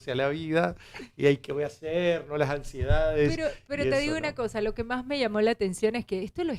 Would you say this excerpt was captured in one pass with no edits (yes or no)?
yes